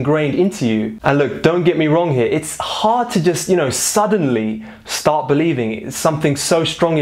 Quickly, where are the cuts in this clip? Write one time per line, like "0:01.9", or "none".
none